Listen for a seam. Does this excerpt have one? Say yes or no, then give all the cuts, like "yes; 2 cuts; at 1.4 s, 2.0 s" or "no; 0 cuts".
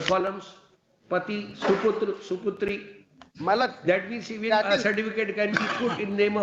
no; 0 cuts